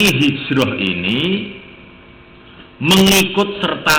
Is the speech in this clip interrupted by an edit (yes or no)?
no